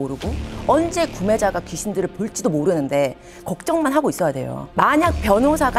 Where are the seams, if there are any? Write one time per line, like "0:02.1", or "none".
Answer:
0:04.6